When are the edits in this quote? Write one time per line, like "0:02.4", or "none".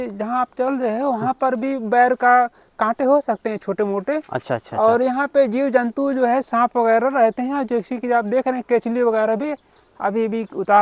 none